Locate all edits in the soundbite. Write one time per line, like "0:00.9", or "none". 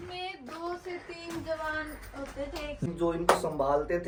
none

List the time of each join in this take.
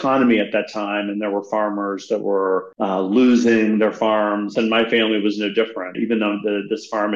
0:02.7
0:04.5
0:06.0

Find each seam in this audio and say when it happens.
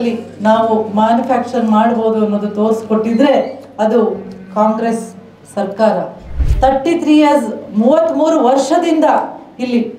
0:06.3

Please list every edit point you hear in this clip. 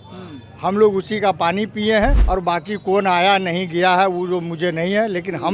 0:02.2

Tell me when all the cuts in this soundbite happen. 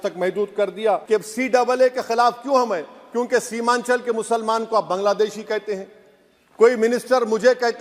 0:01.0

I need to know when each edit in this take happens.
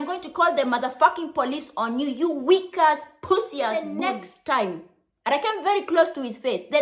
0:03.9

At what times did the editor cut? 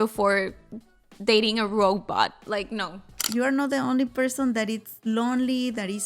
0:03.2

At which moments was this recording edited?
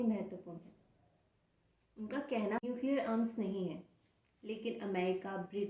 0:02.6

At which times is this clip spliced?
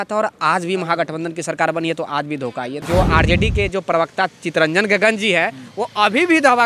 0:02.8

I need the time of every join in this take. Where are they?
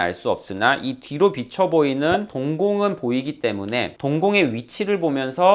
0:04.0

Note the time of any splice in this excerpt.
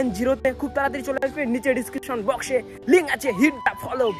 none

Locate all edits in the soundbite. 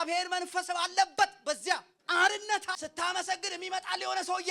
0:01.9
0:02.8

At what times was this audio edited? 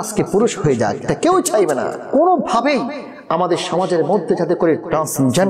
0:02.0

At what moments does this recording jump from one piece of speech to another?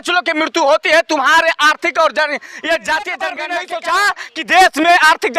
0:03.6

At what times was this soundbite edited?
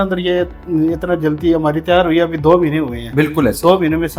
none

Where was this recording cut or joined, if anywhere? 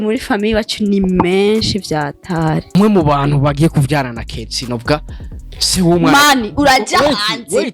0:02.7

